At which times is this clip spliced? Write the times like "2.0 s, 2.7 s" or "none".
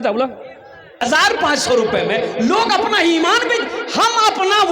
1.0 s